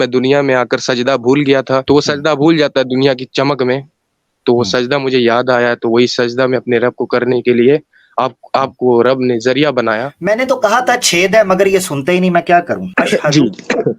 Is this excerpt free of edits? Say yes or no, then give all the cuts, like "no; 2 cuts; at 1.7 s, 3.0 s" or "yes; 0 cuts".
no; 3 cuts; at 1.8 s, 10.1 s, 12.9 s